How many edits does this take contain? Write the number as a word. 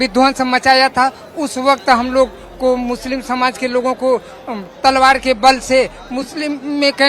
zero